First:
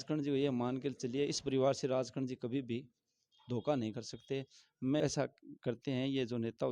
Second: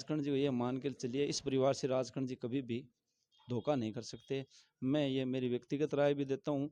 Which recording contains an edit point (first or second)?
first